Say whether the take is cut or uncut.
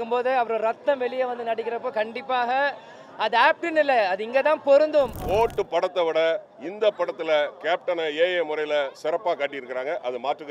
cut